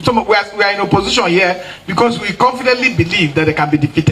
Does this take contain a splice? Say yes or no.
no